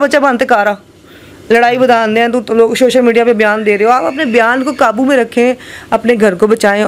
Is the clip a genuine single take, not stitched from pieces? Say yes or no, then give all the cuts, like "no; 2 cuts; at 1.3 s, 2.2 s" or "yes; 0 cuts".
yes; 0 cuts